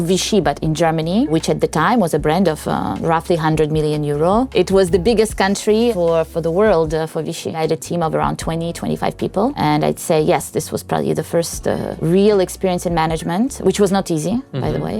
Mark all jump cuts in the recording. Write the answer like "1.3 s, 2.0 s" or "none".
none